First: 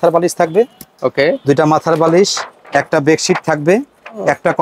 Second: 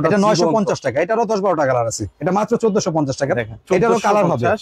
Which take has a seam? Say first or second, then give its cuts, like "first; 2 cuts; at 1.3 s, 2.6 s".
second; 1 cut; at 2.1 s